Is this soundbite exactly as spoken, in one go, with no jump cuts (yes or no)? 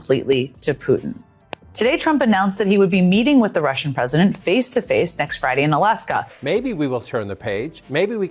no